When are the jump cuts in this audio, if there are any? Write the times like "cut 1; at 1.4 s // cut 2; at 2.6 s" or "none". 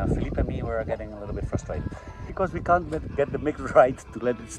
cut 1; at 2.2 s